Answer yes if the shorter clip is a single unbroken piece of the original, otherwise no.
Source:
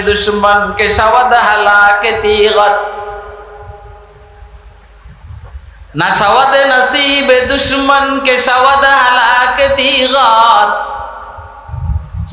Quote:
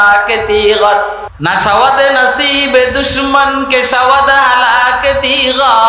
no